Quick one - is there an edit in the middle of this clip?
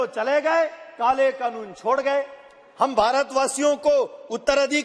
no; 0 cuts

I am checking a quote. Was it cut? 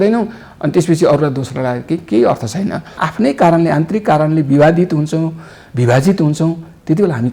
yes; 1 cut; at 3.0 s

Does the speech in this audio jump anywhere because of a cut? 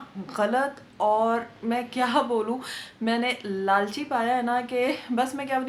no; 0 cuts

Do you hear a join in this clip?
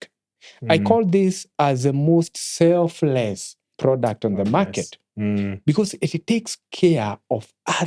no; 0 cuts

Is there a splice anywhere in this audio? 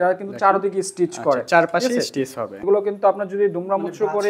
yes; 1 cut; at 2.5 s

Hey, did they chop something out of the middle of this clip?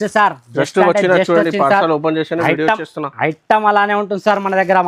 no; 0 cuts

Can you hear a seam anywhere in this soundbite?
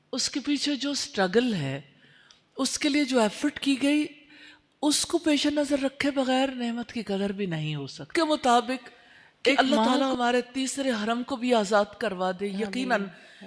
yes; 1 cut; at 8.1 s

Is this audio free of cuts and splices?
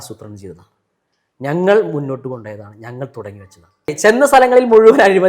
no; 1 cut; at 3.9 s

